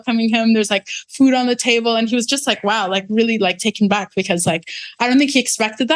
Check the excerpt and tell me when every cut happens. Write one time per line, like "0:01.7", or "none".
none